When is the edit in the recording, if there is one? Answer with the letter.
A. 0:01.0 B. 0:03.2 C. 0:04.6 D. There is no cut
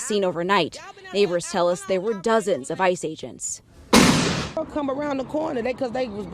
C